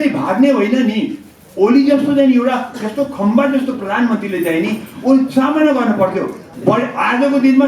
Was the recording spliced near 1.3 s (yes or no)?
no